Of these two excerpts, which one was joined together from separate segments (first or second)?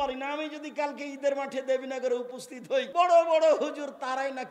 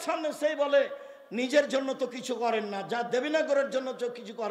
first